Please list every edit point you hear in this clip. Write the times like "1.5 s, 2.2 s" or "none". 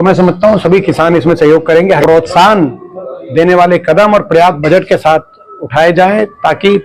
2.0 s